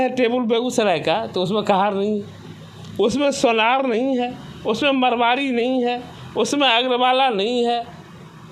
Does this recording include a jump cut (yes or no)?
no